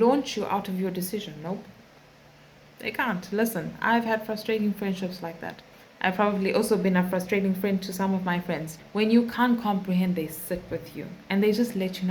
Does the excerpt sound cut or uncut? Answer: cut